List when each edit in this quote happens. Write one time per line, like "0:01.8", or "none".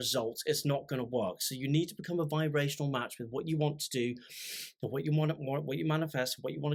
none